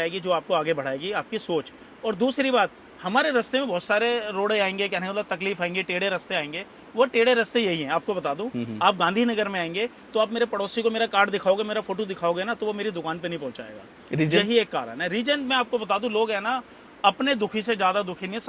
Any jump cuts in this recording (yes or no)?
no